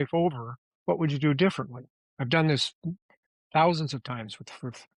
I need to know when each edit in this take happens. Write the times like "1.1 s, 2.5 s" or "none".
none